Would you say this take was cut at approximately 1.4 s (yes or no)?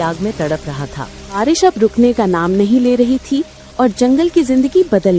yes